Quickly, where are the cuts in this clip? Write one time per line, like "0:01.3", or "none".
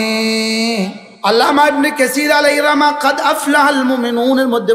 0:01.0